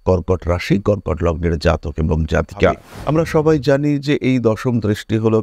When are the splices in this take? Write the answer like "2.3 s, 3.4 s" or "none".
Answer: 2.9 s